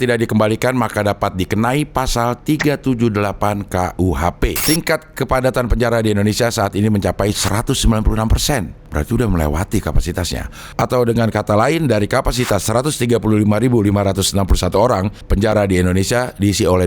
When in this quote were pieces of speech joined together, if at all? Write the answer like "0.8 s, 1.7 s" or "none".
4.6 s